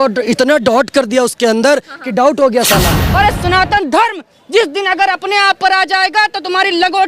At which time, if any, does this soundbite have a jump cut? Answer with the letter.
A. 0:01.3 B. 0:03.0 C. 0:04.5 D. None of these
B